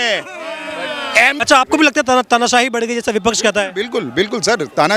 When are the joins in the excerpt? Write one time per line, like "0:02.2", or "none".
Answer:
0:01.4